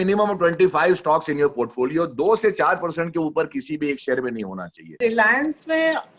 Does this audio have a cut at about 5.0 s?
yes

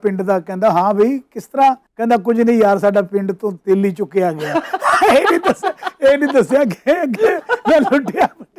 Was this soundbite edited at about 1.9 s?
yes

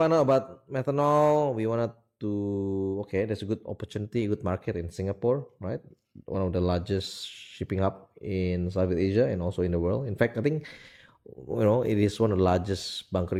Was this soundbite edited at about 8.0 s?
no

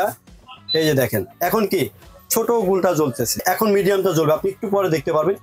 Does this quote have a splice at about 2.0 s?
no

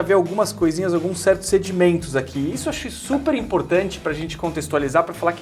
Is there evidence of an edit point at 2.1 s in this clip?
no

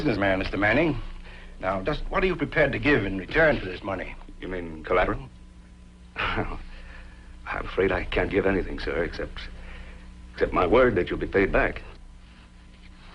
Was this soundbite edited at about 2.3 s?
no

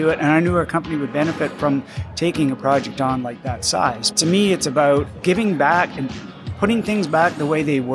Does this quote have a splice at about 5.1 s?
yes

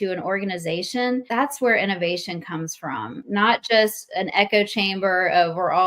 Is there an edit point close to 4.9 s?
no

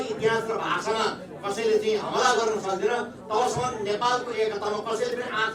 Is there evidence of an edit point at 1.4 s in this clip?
no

